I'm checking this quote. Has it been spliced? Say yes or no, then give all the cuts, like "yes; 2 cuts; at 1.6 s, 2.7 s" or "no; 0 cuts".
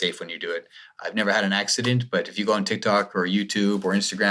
no; 0 cuts